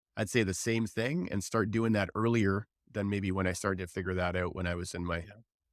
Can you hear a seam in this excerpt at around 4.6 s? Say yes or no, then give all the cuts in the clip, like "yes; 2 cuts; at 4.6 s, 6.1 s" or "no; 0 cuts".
no; 0 cuts